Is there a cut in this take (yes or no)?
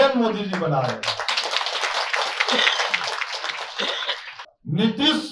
yes